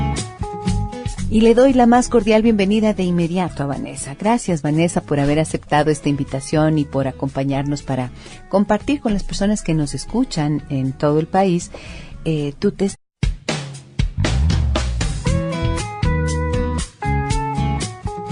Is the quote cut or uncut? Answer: uncut